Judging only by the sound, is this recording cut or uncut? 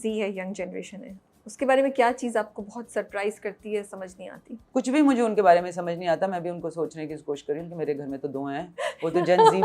uncut